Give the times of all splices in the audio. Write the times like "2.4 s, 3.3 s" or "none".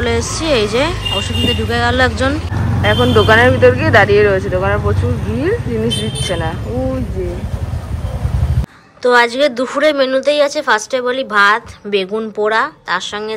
2.5 s, 8.6 s